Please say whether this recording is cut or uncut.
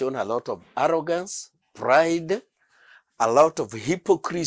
uncut